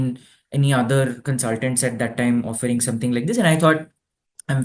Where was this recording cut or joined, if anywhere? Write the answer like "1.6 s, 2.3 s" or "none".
none